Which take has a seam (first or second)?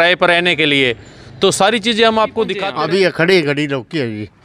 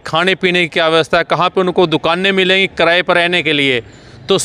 first